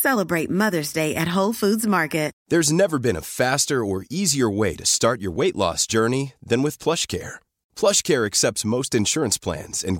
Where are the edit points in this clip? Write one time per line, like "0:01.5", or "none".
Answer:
0:02.3